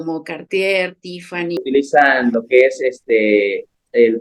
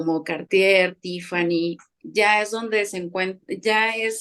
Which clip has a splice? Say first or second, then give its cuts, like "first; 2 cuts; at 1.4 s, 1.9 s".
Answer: first; 1 cut; at 1.6 s